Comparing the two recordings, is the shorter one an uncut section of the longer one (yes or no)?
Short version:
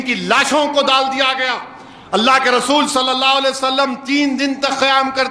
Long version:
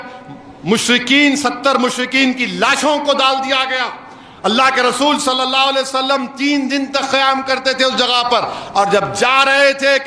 yes